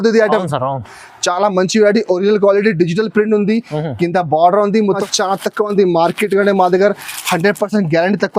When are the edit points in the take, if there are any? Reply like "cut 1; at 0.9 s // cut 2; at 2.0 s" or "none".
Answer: cut 1; at 5.1 s